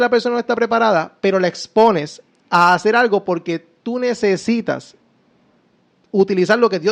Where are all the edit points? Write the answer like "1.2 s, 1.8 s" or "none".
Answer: none